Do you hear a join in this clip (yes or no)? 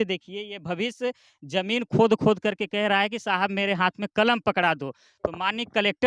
no